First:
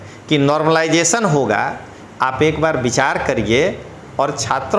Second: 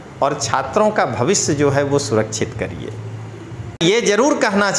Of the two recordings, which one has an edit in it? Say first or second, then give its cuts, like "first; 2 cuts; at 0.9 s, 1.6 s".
second; 1 cut; at 3.8 s